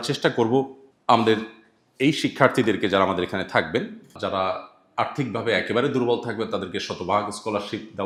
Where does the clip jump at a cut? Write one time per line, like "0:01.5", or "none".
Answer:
none